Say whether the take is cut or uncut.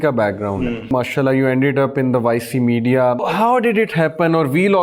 cut